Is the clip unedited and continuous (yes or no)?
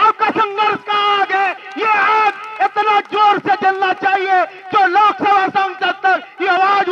yes